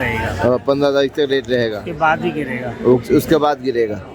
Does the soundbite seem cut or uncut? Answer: uncut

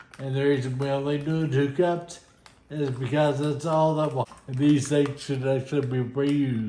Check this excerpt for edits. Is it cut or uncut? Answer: cut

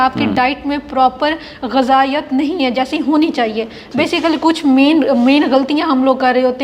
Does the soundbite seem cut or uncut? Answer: uncut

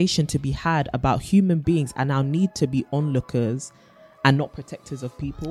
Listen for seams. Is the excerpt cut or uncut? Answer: uncut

